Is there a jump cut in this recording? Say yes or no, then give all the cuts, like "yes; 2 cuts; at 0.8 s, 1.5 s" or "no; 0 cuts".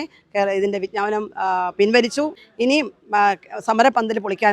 yes; 1 cut; at 2.4 s